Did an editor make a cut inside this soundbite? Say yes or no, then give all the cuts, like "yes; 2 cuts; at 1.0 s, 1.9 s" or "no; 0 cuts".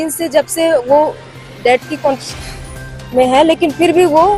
no; 0 cuts